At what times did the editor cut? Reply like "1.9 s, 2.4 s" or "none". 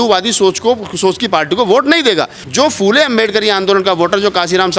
2.4 s